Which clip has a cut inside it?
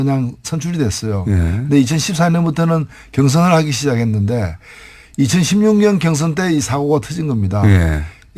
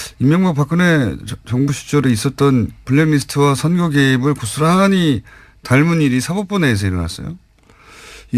second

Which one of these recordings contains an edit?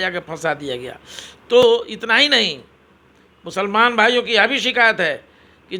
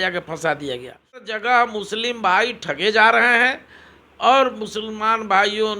second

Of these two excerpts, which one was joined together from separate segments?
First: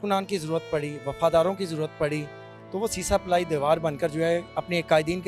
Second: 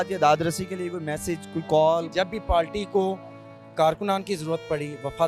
second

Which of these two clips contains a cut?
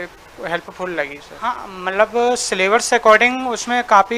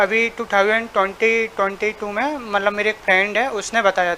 first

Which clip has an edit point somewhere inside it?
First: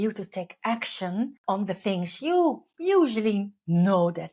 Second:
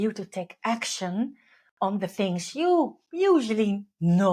first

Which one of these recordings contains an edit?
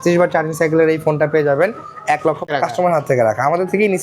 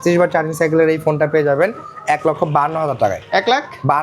first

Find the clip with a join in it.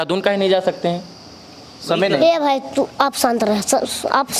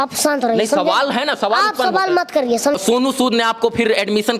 second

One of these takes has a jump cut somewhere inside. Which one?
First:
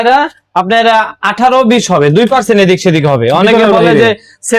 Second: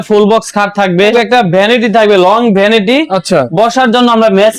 second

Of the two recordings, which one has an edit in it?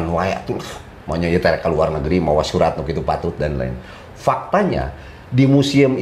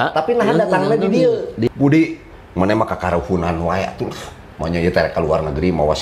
second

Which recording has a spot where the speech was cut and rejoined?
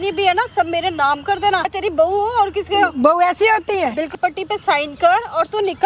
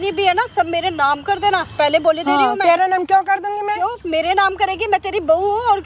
first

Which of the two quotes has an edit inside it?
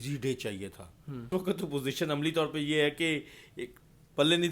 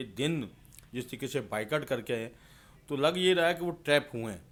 first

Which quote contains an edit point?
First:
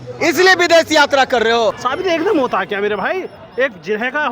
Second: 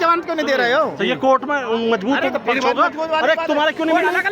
first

